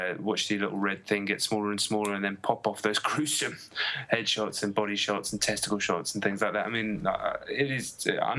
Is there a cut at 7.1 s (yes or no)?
no